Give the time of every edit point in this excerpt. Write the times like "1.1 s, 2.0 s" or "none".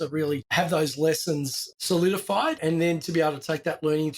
2.6 s